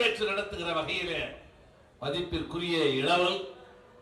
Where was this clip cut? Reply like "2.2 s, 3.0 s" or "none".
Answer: none